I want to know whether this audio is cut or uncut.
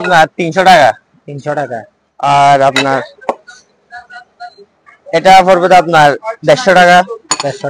uncut